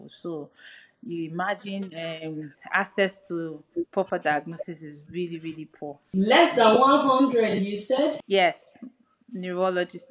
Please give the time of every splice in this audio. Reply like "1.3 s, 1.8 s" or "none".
6.0 s, 8.2 s